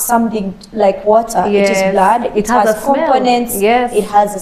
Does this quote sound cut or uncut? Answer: uncut